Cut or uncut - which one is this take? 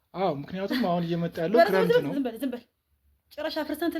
uncut